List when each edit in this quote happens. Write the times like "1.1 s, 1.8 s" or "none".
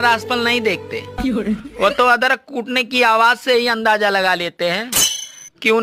none